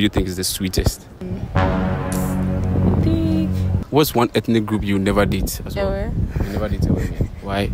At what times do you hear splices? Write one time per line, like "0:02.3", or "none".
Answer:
0:01.2
0:03.7